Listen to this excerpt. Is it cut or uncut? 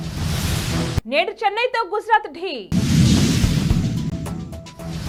uncut